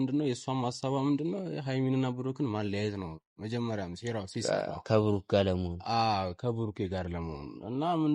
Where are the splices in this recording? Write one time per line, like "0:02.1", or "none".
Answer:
none